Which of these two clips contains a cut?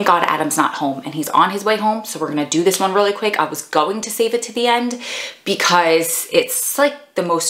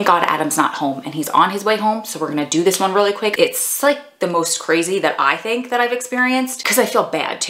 second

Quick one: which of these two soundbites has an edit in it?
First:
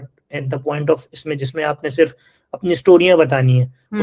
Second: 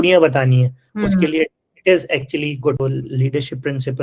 second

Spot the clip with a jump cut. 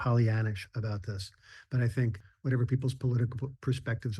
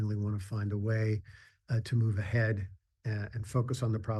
first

